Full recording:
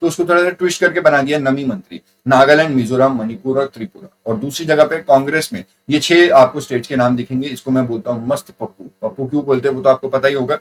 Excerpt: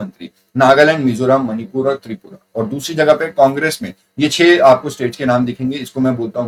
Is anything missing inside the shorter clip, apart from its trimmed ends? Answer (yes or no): no